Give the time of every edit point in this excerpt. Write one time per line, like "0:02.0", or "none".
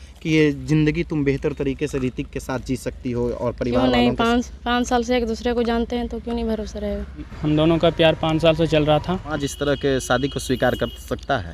0:07.3
0:09.5